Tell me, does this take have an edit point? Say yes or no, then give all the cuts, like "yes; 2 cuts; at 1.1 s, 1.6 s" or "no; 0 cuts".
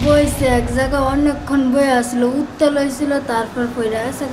no; 0 cuts